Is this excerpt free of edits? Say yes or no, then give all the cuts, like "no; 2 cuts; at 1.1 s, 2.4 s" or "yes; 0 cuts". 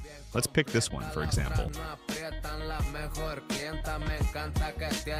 yes; 0 cuts